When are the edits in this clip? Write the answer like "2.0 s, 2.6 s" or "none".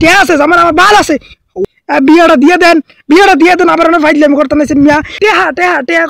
1.6 s, 5.2 s

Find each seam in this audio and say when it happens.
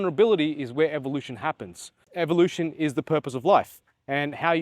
2.0 s

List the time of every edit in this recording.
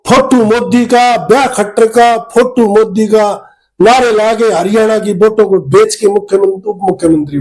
none

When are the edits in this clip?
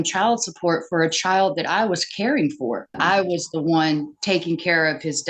3.0 s

